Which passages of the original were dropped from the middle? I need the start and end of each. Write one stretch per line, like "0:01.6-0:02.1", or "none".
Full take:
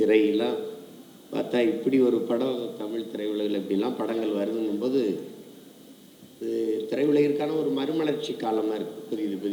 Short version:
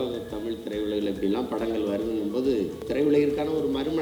0:05.3-0:06.9